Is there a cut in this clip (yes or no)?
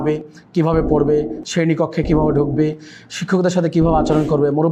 no